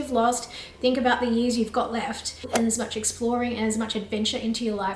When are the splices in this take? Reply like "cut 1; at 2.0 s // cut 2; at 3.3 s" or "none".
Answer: cut 1; at 2.5 s